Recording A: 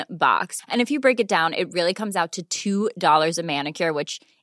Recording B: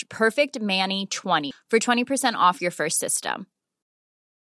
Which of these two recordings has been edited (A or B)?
B